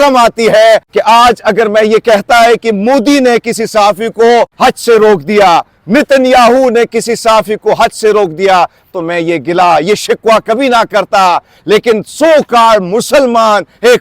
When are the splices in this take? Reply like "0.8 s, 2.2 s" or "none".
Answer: 0.9 s, 4.5 s